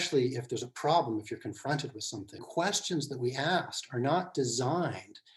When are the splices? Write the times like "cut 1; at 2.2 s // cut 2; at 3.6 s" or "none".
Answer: cut 1; at 2.4 s